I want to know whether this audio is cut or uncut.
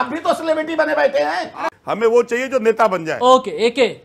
cut